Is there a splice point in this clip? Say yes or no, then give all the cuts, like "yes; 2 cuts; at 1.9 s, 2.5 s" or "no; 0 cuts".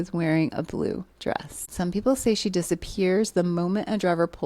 yes; 1 cut; at 1.5 s